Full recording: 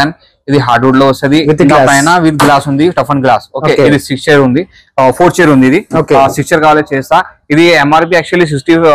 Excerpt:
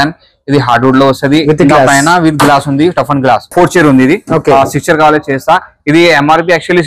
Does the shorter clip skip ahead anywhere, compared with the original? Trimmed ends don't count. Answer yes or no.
yes